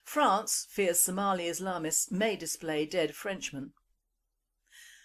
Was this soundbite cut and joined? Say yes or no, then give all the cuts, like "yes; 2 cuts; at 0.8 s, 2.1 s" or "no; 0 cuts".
no; 0 cuts